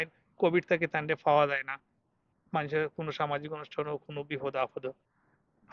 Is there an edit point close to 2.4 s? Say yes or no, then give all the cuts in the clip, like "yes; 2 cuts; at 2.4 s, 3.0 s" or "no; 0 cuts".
no; 0 cuts